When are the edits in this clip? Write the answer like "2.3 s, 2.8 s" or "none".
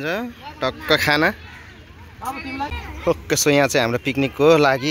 2.9 s